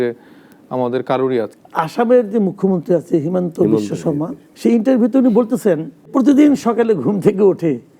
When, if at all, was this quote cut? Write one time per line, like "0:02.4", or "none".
0:01.6
0:04.4
0:06.1